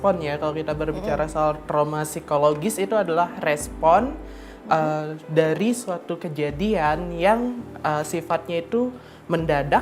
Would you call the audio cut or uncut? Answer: uncut